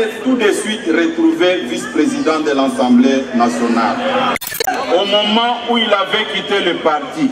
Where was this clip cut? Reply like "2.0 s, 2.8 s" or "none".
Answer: 4.7 s